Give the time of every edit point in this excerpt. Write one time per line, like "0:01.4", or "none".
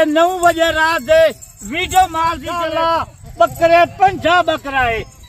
0:02.5